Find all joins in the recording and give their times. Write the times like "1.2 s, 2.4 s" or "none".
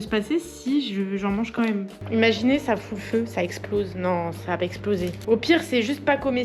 2.0 s, 5.2 s